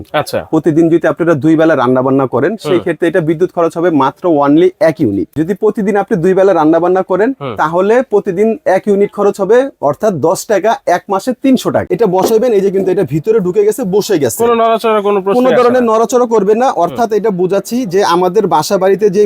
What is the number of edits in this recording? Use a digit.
2